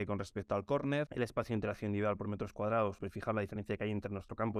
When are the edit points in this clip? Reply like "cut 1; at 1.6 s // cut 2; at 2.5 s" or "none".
cut 1; at 1.1 s // cut 2; at 3.0 s

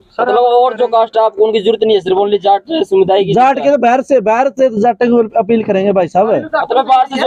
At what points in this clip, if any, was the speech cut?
none

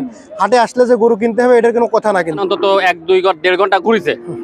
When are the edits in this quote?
cut 1; at 2.4 s

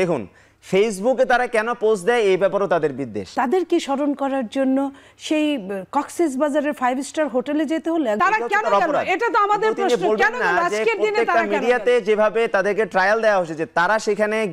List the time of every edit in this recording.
cut 1; at 3.2 s // cut 2; at 8.2 s

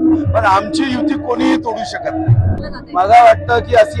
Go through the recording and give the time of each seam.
cut 1; at 2.6 s

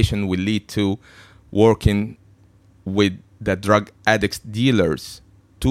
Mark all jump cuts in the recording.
none

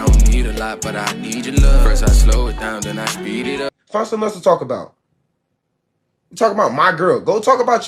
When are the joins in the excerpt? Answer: cut 1; at 3.8 s

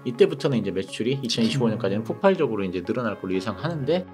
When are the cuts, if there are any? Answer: none

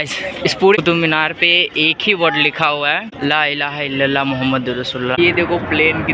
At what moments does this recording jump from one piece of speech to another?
cut 1; at 3.1 s // cut 2; at 5.2 s

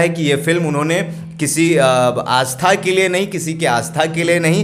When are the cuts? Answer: none

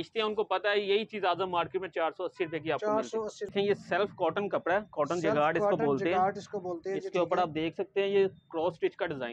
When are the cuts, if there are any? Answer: cut 1; at 3.5 s

